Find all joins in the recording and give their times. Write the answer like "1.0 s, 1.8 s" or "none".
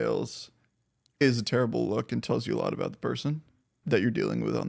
1.2 s, 3.8 s